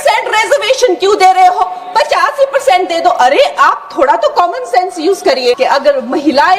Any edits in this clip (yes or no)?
yes